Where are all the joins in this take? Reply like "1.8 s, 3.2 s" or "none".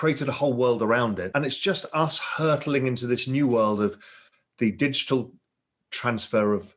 1.2 s